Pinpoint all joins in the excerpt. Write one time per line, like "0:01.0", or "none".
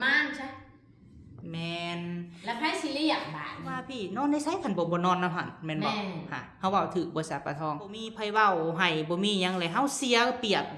0:04.2
0:08.1